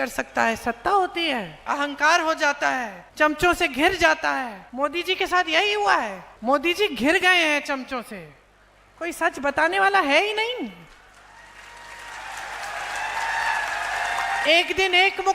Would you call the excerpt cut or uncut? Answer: cut